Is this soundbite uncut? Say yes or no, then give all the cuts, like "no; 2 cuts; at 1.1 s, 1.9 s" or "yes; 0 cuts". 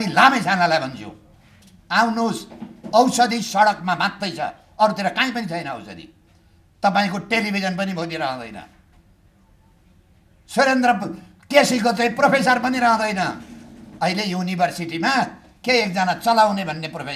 yes; 0 cuts